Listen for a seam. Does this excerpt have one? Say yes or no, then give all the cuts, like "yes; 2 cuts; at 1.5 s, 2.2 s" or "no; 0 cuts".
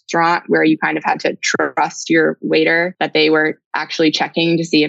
yes; 1 cut; at 3.0 s